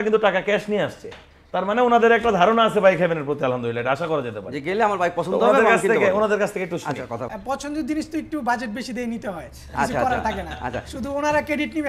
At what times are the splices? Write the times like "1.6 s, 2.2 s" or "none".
7.3 s